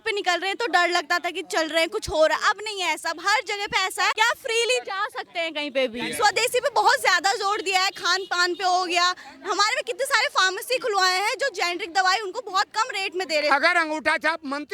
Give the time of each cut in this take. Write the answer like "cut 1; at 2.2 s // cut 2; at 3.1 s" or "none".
cut 1; at 4.1 s // cut 2; at 6.1 s // cut 3; at 13.5 s